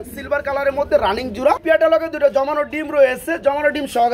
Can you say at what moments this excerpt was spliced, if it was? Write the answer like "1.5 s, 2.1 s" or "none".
1.8 s